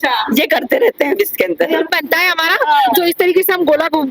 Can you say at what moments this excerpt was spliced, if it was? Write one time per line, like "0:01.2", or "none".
0:01.9